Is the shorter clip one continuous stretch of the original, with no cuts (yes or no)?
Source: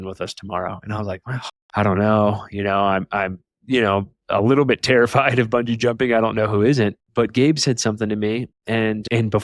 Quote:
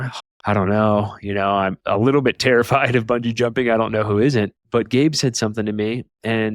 no